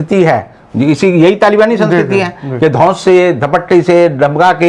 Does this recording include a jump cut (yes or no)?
no